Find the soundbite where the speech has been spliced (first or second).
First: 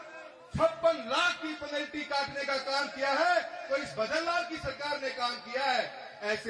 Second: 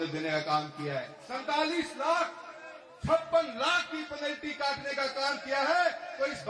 second